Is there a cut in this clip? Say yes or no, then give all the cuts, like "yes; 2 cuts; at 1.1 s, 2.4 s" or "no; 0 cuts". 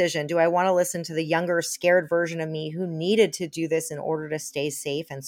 no; 0 cuts